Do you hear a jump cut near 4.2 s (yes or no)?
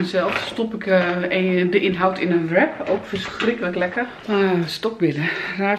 yes